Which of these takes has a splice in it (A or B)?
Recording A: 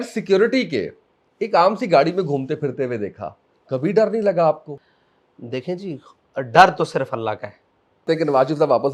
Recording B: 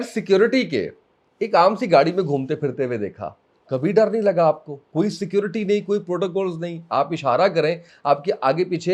A